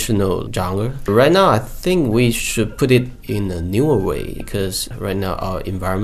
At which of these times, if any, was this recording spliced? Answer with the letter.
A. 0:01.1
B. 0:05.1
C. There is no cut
A